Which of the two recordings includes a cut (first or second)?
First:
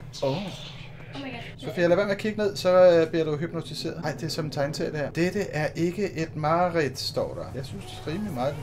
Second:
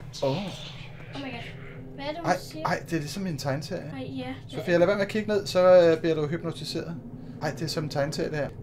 first